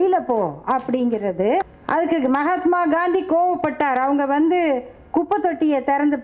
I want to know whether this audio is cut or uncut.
cut